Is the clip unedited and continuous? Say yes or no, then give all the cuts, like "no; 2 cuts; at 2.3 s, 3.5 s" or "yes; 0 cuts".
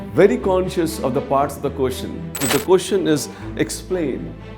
no; 1 cut; at 2.4 s